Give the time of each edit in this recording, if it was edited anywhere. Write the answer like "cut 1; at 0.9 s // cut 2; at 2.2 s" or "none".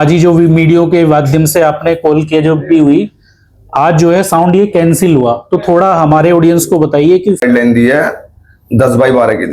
cut 1; at 7.4 s